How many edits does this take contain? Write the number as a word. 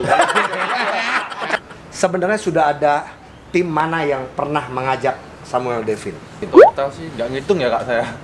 one